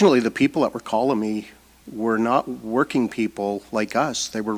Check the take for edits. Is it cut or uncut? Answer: uncut